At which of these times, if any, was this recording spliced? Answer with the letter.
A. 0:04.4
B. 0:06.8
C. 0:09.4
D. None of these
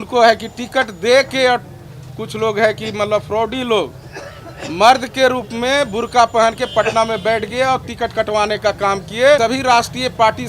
C